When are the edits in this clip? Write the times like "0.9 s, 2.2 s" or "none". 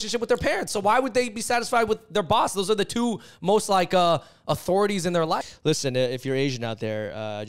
5.5 s